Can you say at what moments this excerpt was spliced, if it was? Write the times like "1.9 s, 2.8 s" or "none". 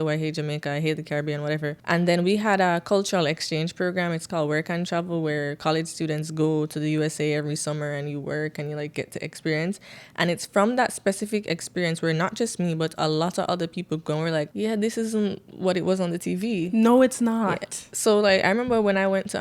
1.8 s, 14.5 s